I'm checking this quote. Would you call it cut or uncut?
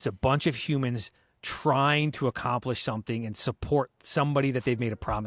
uncut